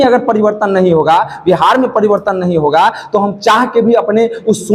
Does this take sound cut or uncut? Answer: uncut